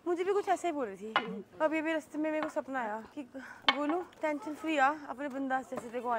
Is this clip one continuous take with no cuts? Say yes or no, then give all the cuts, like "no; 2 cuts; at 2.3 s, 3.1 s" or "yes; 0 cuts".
yes; 0 cuts